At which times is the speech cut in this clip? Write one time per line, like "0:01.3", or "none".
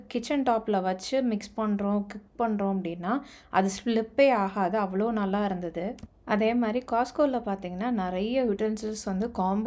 0:06.0